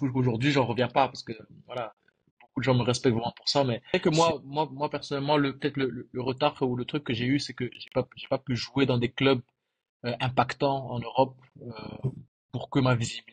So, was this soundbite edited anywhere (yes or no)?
yes